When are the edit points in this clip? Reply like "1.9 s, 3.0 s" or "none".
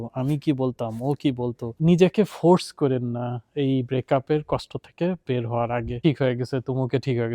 1.7 s, 5.9 s